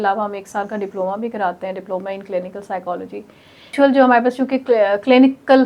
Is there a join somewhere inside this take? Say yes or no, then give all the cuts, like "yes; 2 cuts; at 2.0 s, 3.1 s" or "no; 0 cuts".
yes; 1 cut; at 3.7 s